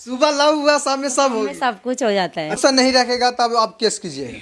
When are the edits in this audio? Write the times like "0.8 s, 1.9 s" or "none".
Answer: 2.6 s